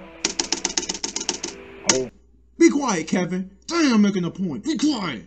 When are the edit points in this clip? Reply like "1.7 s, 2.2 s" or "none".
none